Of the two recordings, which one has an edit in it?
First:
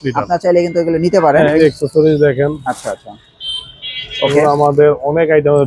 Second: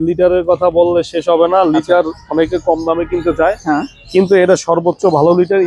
first; 1 cut; at 1.6 s

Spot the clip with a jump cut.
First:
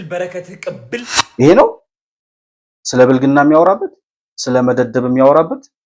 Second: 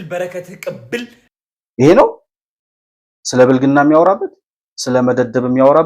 first; 1 cut; at 1.2 s

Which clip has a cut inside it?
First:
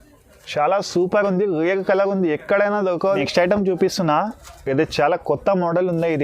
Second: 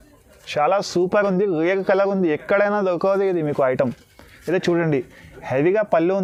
first; 1 cut; at 3.2 s

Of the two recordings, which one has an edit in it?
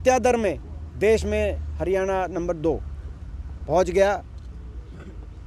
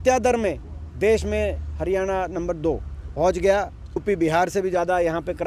second; 2 cuts; at 3.0 s, 4.0 s

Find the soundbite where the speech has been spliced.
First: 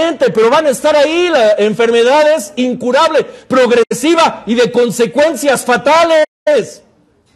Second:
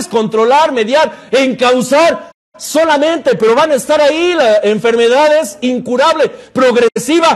first; 1 cut; at 5.4 s

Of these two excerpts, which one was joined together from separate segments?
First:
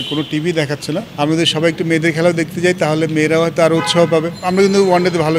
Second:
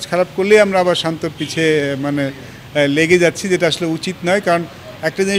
first; 2 cuts; at 1.1 s, 4.4 s

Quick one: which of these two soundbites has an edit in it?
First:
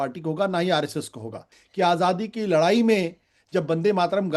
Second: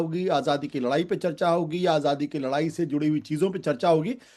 first; 1 cut; at 1.6 s

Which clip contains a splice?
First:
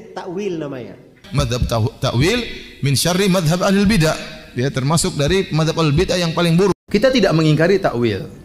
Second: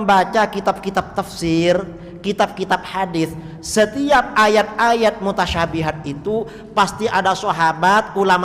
first; 2 cuts; at 1.2 s, 6.8 s

